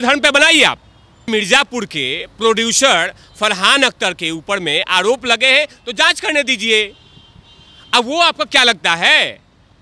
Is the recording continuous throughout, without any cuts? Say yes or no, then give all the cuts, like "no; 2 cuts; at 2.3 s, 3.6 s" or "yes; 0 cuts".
no; 1 cut; at 1.3 s